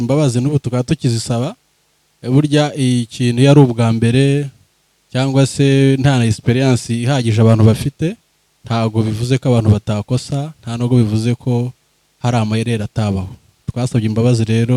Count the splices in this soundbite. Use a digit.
0